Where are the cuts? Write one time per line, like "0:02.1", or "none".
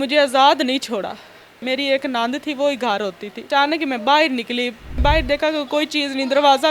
0:01.6
0:03.5
0:05.0